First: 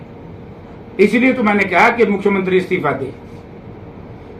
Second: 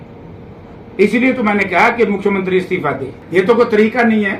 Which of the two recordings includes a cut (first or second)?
second